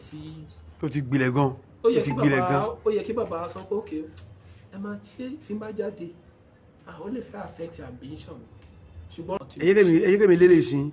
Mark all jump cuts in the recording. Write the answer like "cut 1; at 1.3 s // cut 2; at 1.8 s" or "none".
cut 1; at 9.3 s